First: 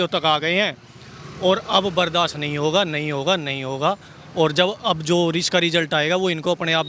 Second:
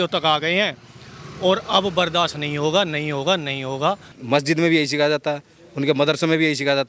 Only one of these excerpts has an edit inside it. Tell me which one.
second; 1 cut; at 4.1 s

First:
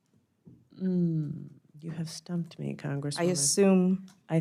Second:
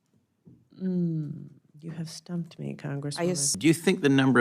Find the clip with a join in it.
second; 1 cut; at 3.5 s

